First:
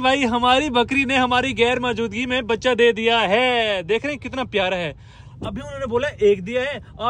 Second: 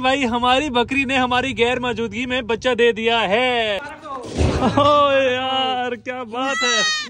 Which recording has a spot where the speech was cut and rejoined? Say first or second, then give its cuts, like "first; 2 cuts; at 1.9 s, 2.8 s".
second; 1 cut; at 3.8 s